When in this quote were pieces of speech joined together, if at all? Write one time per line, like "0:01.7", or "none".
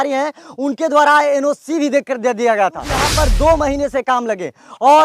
0:03.0